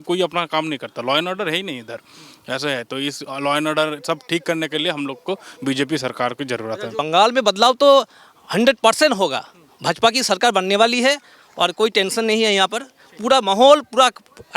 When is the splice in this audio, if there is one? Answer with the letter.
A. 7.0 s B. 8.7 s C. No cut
A